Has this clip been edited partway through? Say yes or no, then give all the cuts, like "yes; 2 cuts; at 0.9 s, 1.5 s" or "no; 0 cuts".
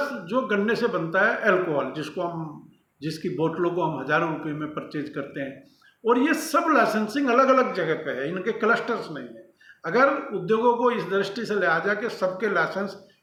no; 0 cuts